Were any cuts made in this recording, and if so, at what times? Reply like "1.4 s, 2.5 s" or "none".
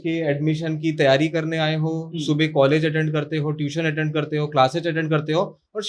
none

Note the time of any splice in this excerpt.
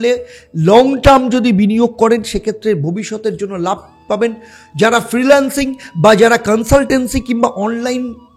none

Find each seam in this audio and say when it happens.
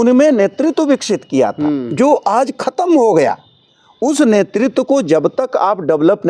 none

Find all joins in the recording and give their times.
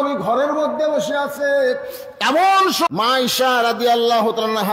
2.9 s

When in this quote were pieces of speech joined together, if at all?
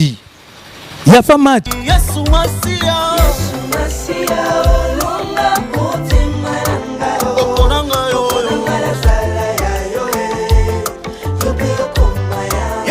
1.7 s

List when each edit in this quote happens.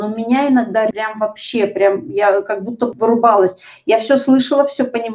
1.0 s, 2.9 s

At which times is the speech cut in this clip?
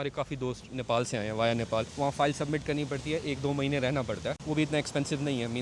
1.9 s, 4.4 s

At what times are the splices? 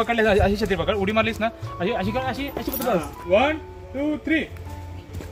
3.3 s

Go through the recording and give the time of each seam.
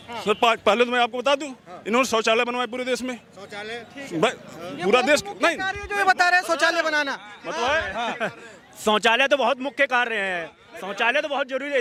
none

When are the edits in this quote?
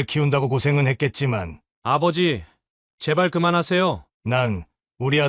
4.1 s

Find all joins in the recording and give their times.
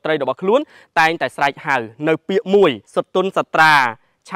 2.8 s

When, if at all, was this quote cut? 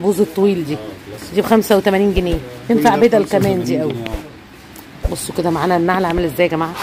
none

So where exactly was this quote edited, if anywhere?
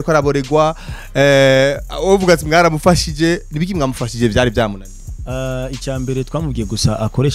none

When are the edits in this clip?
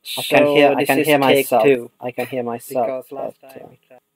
1.1 s, 2.3 s

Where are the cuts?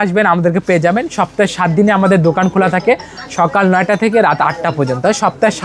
none

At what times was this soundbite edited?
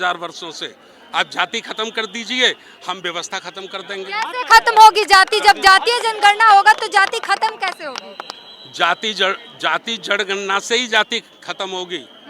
none

